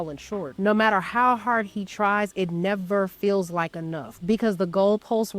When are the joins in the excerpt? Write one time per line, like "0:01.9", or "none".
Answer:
0:00.8
0:04.4